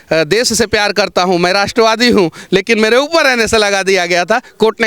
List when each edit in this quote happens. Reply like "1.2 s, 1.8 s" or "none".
none